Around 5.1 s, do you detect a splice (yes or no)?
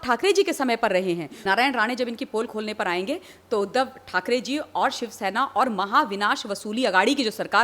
no